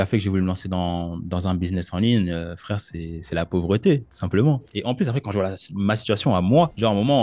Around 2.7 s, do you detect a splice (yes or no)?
no